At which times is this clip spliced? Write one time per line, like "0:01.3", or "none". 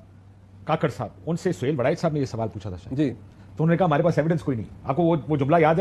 none